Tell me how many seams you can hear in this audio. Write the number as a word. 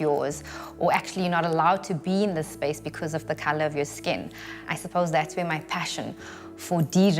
one